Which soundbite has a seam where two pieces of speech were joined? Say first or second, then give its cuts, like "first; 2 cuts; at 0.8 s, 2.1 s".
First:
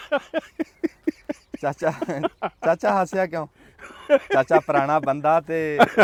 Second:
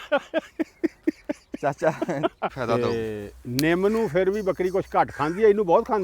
second; 1 cut; at 2.5 s